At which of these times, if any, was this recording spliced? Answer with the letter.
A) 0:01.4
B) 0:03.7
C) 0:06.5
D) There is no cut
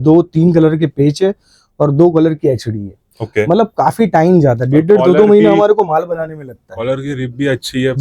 D